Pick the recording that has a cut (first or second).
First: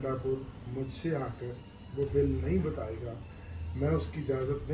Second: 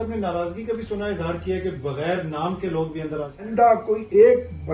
second